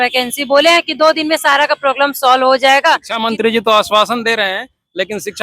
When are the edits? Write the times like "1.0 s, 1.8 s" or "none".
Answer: 3.1 s

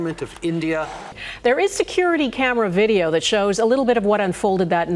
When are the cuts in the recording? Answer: none

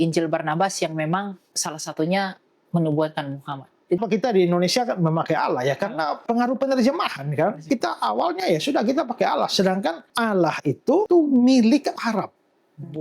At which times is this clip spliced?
4.0 s, 6.2 s, 7.6 s, 10.0 s, 11.1 s

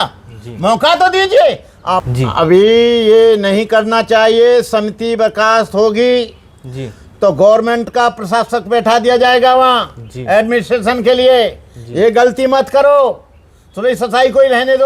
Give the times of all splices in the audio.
2.1 s

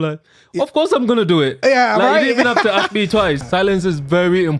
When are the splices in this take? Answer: 3.4 s

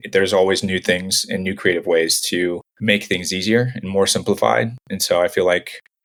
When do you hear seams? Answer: none

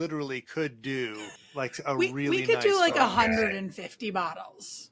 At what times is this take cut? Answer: none

